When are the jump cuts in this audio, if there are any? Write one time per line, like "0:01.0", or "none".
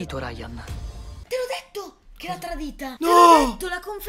none